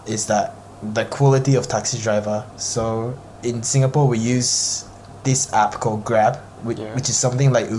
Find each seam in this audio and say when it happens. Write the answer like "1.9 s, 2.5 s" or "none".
none

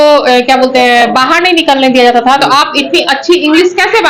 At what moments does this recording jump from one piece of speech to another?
none

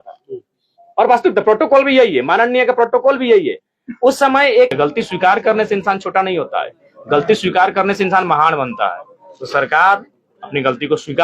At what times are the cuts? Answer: 4.7 s

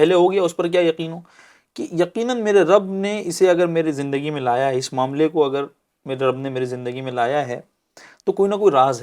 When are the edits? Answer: none

